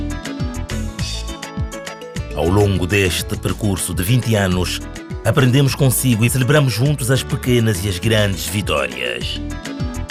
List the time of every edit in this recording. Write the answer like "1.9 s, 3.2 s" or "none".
none

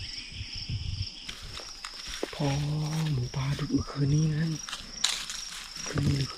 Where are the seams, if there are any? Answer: 1.3 s

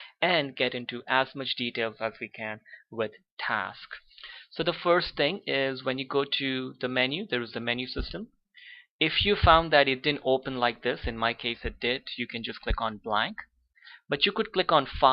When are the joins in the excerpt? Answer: 13.3 s

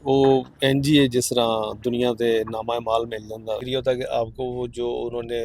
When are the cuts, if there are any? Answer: 3.6 s

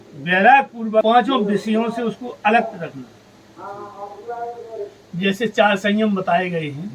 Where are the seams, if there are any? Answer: 1.0 s

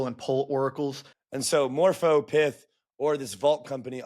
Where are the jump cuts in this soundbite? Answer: 1.1 s

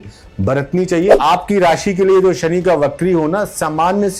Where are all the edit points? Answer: 1.1 s

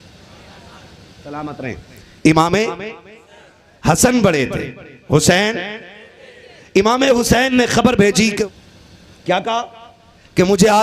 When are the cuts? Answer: 8.4 s

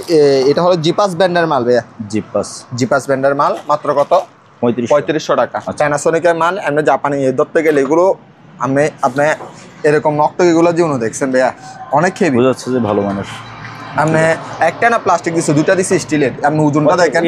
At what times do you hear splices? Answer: 5.6 s, 11.7 s

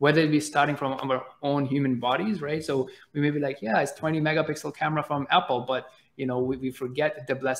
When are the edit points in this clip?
none

